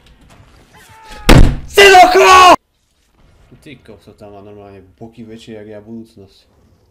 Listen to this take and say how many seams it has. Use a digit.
1